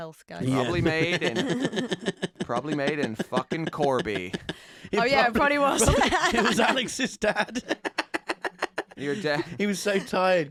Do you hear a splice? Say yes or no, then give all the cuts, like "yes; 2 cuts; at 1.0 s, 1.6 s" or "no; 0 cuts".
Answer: no; 0 cuts